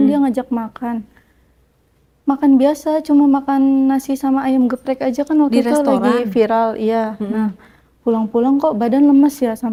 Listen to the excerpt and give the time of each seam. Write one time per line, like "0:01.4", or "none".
none

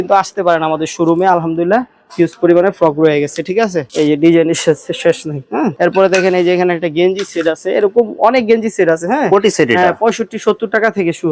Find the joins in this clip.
none

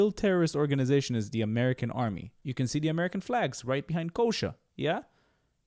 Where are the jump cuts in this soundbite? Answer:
0:02.4

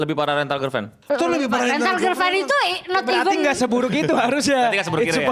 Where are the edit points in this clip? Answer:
0:00.9

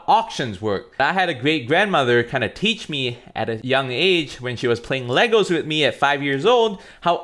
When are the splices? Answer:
0:01.0

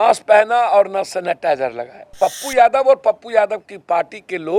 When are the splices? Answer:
0:02.1

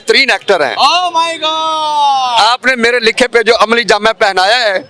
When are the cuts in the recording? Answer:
none

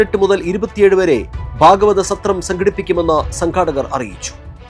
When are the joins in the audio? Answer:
none

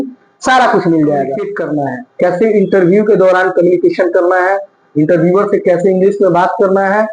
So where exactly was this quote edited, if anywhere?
0:01.6

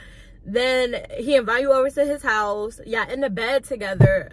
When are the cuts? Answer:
none

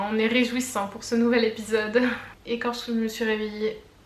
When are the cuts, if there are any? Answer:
0:02.3

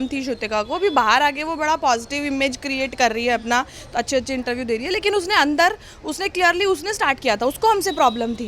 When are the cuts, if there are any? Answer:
none

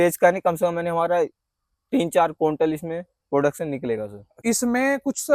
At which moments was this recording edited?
0:04.2

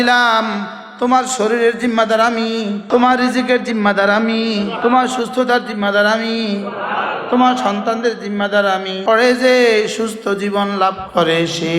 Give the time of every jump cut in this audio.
0:02.8
0:04.8
0:08.9

